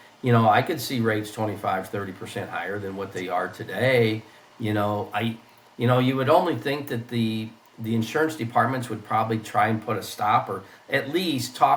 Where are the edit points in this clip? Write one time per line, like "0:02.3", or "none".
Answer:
none